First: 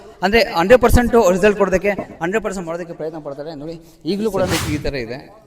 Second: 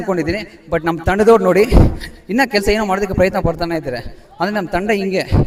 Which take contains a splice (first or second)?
first